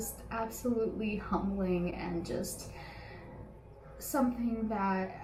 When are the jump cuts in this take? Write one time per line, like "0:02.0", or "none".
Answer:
none